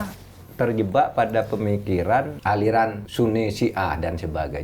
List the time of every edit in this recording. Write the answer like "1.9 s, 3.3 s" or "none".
2.3 s, 3.0 s